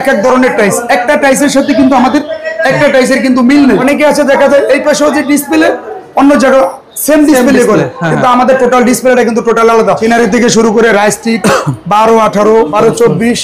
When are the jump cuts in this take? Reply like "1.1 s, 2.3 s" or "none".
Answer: 3.8 s, 10.0 s, 12.7 s